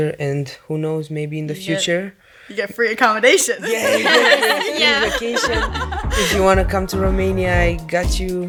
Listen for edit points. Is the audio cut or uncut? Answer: uncut